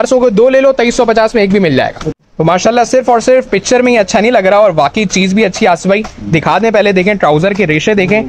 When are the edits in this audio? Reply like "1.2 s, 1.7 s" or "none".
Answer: none